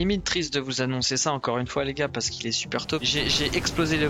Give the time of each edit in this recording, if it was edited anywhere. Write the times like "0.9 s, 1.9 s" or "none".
3.0 s